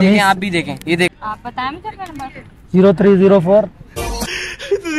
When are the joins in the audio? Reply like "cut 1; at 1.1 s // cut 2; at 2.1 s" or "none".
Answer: cut 1; at 1.1 s // cut 2; at 4.0 s